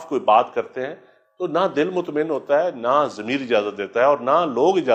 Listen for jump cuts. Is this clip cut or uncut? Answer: uncut